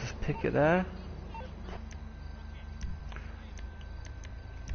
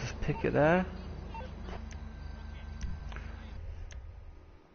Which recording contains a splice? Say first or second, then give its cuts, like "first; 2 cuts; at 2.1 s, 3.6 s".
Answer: first; 1 cut; at 3.6 s